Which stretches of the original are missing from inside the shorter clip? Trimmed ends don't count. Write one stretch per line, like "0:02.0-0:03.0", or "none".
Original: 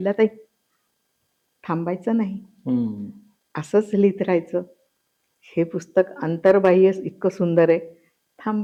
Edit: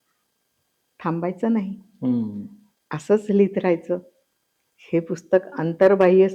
none